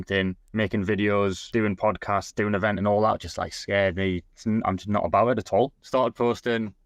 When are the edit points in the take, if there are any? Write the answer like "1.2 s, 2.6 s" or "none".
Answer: 1.4 s, 5.8 s